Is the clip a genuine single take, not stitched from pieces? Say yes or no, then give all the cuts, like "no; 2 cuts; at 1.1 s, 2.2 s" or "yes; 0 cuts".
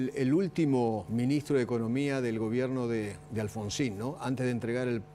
no; 1 cut; at 1.0 s